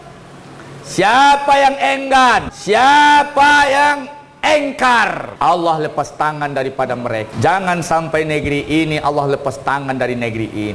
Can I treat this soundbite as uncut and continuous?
no; 3 cuts; at 2.5 s, 5.3 s, 7.3 s

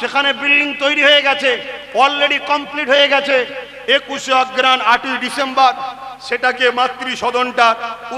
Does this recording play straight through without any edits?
yes; 0 cuts

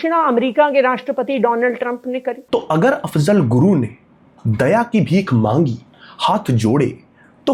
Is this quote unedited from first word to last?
yes; 0 cuts

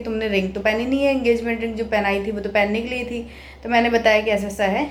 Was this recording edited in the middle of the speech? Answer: no; 0 cuts

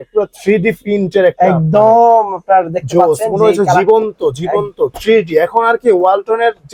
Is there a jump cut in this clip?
no; 0 cuts

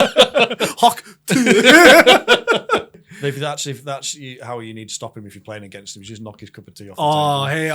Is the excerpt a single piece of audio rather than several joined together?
no; 1 cut; at 3.0 s

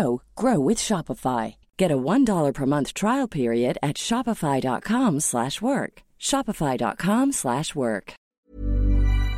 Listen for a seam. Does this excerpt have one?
yes; 1 cut; at 8.3 s

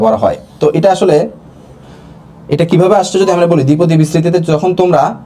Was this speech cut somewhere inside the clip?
no; 0 cuts

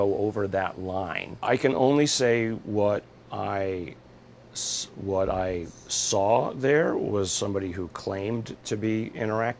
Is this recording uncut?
no; 1 cut; at 1.2 s

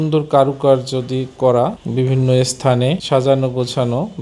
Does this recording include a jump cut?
no; 0 cuts

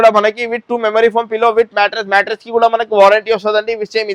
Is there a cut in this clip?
no; 0 cuts

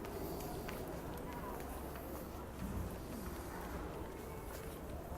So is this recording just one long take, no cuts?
no; 2 cuts; at 1.2 s, 3.1 s

